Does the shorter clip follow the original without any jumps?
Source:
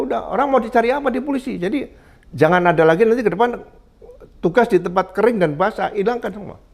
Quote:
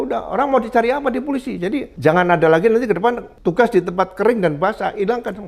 no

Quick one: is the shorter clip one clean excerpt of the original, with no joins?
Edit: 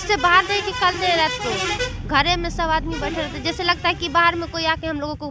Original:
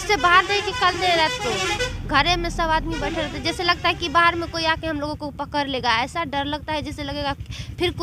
yes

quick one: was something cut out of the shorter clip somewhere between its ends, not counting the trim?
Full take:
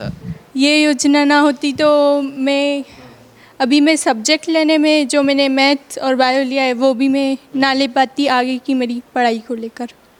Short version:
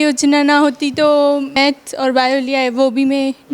yes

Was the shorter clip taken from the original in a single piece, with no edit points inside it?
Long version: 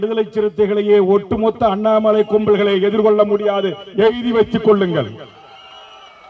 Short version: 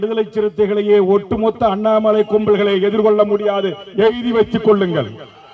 yes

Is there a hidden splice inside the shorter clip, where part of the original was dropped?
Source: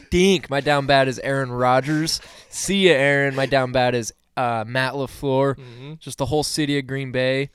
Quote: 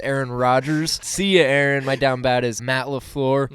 yes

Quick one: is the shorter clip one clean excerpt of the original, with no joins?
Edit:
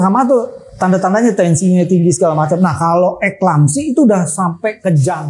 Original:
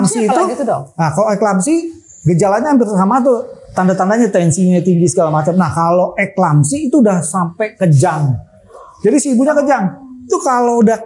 yes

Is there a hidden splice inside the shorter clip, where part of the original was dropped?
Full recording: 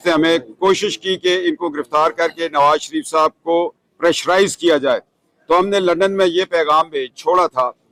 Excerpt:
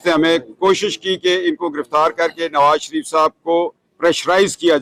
no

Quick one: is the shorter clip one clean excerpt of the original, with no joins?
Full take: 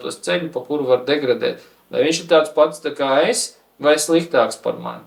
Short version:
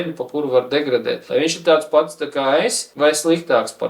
no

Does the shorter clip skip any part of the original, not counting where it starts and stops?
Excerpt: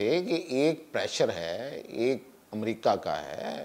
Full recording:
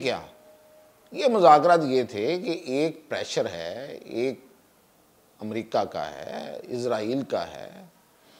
yes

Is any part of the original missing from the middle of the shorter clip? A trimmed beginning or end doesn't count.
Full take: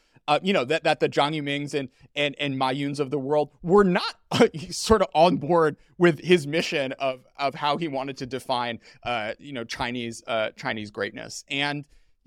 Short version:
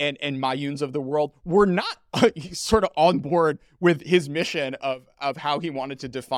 no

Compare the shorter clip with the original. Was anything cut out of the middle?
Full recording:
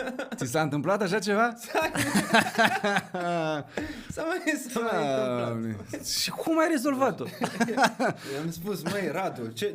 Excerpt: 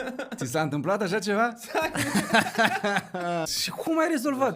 yes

